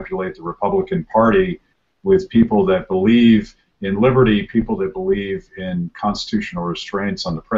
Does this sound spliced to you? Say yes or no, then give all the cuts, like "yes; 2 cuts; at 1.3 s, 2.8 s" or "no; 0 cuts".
yes; 1 cut; at 5.6 s